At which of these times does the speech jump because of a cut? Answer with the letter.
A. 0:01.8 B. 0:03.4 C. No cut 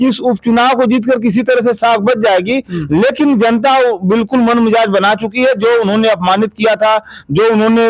C